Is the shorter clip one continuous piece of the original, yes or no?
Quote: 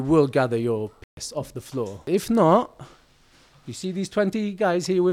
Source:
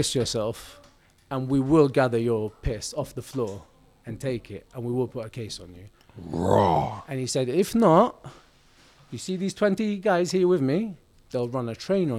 no